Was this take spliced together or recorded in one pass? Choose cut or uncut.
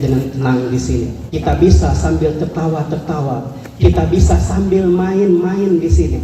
cut